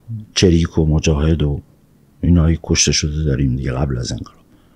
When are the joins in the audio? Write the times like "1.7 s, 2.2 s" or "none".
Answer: none